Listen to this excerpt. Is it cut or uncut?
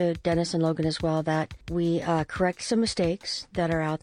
cut